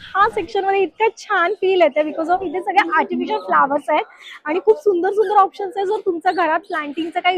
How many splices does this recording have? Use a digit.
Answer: 0